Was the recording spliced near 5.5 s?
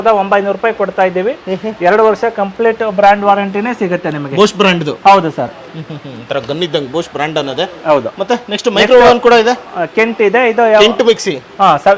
no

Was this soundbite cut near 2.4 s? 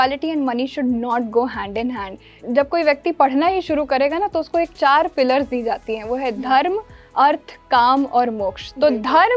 yes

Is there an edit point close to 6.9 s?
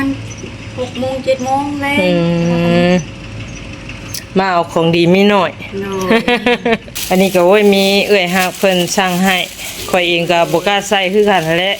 yes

